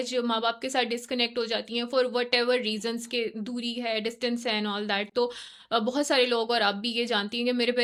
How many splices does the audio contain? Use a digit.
0